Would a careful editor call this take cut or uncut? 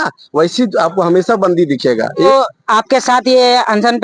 cut